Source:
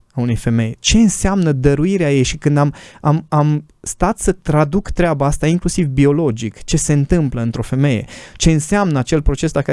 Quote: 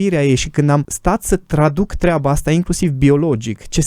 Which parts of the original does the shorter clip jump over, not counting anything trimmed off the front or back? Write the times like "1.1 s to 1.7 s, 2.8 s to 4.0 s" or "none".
2.8 s to 3.9 s